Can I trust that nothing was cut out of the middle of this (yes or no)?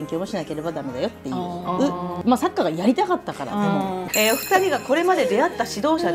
no